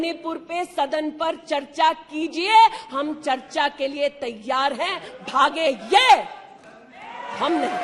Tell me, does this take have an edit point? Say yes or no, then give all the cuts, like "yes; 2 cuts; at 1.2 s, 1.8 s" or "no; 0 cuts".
no; 0 cuts